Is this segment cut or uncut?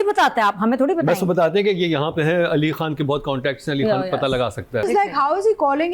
cut